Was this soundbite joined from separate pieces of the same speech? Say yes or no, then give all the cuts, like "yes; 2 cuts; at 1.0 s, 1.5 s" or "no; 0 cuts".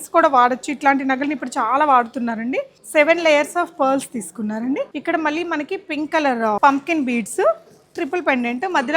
yes; 3 cuts; at 2.8 s, 4.9 s, 6.6 s